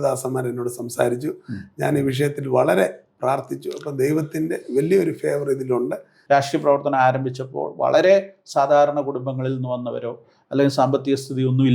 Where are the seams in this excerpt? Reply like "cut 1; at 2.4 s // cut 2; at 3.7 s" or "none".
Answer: cut 1; at 6.4 s